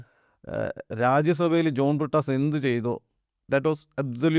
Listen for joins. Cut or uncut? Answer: uncut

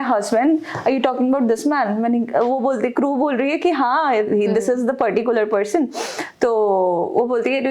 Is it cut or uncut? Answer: uncut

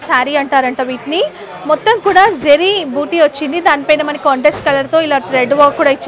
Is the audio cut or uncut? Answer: uncut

